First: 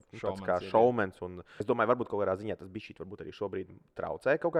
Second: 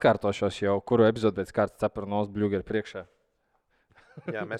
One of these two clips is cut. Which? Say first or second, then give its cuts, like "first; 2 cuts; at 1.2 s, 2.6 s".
first; 1 cut; at 1.5 s